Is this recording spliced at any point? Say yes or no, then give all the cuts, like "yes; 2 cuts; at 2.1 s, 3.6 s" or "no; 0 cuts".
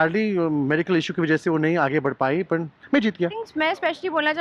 yes; 1 cut; at 3.4 s